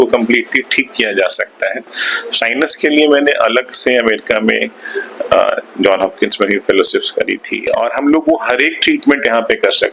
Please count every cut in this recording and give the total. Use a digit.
2